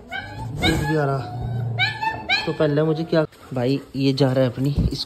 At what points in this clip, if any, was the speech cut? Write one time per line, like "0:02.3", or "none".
0:03.3